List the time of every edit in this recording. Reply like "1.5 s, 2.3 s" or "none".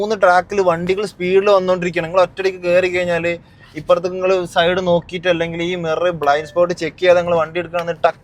none